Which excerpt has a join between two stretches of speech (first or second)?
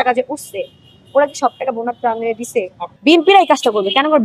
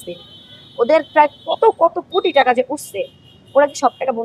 first